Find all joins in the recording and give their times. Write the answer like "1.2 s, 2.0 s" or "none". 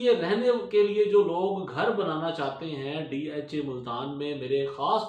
none

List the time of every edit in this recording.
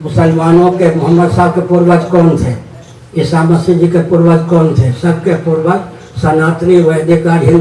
none

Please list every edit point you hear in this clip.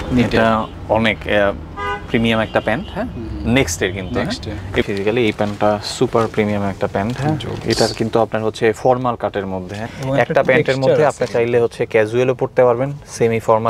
4.8 s

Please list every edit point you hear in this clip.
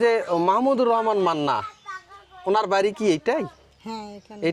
none

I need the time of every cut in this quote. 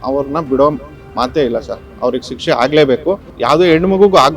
3.3 s

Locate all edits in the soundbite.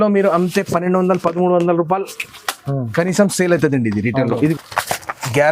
4.5 s

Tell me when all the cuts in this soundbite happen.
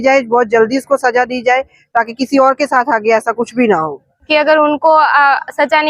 4.3 s

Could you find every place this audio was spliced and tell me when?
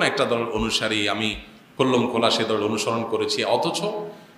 none

